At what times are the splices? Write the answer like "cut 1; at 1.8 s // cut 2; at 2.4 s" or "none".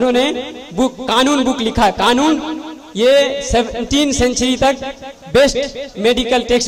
none